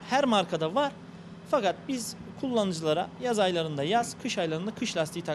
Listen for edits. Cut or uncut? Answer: uncut